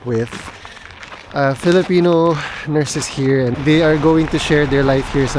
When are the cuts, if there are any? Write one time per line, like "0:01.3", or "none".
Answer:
none